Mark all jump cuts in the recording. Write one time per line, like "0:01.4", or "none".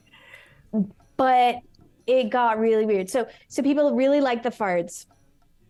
none

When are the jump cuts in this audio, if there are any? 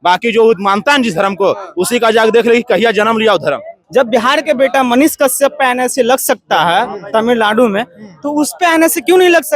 0:03.7

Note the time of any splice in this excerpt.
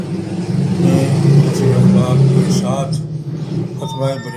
none

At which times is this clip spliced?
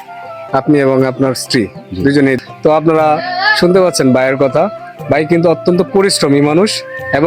0:02.4

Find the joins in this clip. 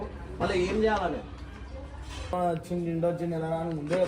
0:02.3

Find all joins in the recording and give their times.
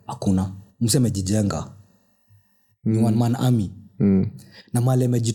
none

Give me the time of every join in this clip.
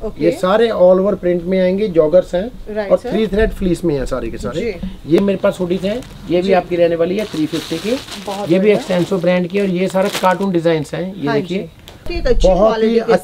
0:05.2
0:12.1

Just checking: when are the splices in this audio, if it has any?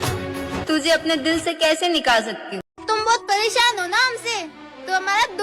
0:02.8

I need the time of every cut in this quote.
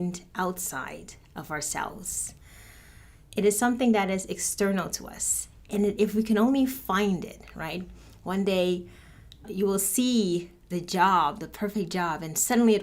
0:09.5
0:10.6

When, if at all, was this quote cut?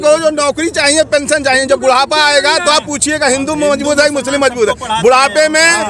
none

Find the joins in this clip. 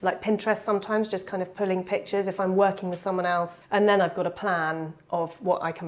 0:03.5

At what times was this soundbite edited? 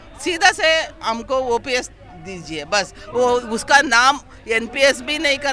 none

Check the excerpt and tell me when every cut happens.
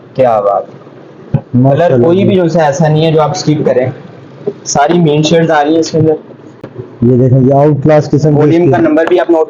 none

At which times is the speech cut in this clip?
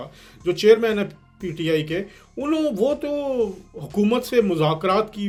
none

